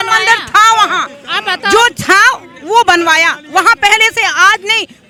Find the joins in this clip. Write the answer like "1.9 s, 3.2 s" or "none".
none